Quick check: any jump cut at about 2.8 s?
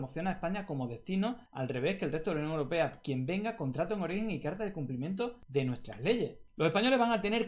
no; 3 cuts; at 1.5 s, 5.4 s, 6.4 s

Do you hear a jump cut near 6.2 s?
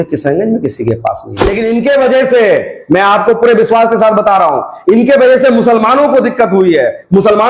no; 1 cut; at 1.5 s

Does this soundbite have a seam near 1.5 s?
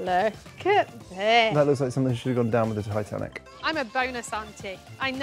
yes; 2 cuts; at 1.5 s, 3.5 s

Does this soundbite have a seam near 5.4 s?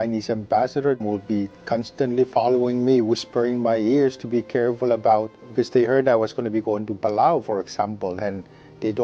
yes; 2 cuts; at 1.0 s, 5.4 s

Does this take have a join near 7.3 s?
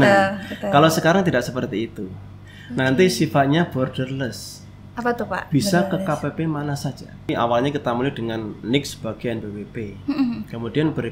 yes; 1 cut; at 7.3 s

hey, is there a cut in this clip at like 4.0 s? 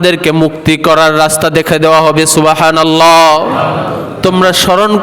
yes; 1 cut; at 4.0 s

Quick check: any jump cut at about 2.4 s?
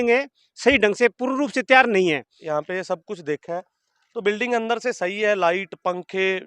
yes; 1 cut; at 2.4 s

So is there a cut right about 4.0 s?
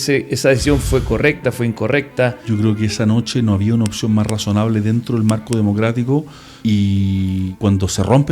no; 3 cuts; at 2.4 s, 6.4 s, 7.5 s

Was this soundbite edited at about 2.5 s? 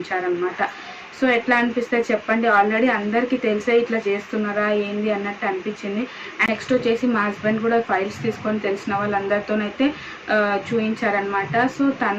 no; 0 cuts

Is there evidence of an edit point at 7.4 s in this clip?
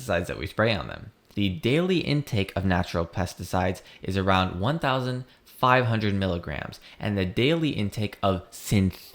no; 1 cut; at 1.4 s

